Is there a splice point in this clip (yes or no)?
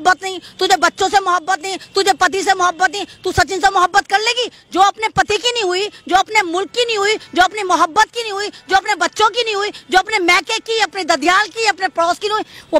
no